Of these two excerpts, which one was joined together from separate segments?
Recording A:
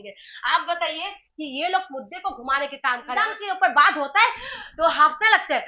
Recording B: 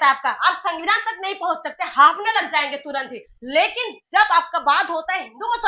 A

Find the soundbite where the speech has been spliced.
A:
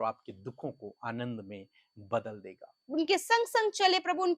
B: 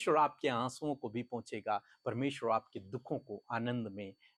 A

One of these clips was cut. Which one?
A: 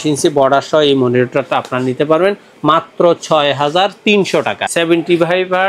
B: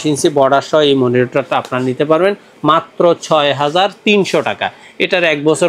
A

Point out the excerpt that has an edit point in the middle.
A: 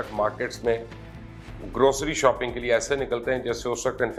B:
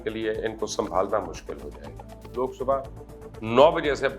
B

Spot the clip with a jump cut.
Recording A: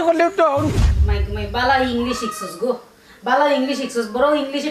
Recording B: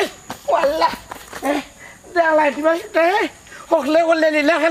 A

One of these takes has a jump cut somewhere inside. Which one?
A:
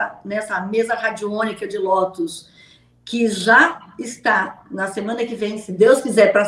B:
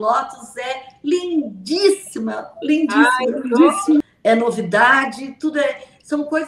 B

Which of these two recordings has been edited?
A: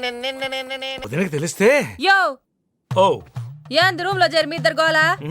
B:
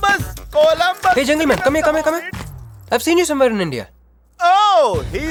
A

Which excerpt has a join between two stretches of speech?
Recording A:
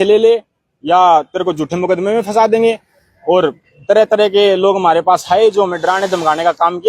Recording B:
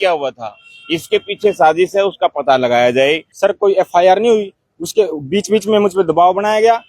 B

